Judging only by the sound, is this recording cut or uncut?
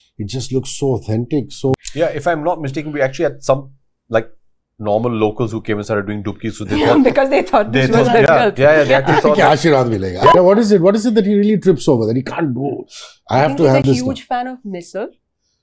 cut